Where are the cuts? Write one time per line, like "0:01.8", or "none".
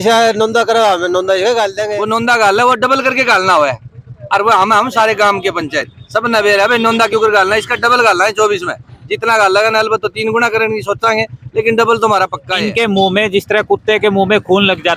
0:01.8
0:12.4